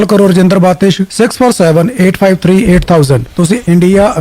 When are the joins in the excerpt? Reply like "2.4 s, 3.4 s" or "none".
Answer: 3.3 s